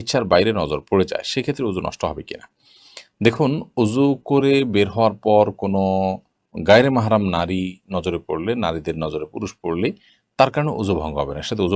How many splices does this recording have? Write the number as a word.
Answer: zero